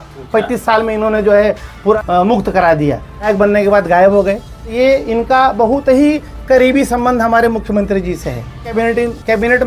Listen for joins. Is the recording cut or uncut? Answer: cut